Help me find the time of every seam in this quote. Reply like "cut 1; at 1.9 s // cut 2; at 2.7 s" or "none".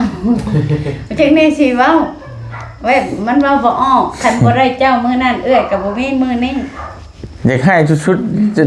none